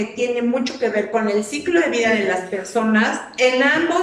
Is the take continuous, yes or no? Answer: yes